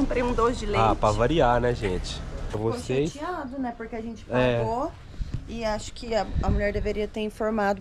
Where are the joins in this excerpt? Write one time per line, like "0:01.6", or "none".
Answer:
0:02.5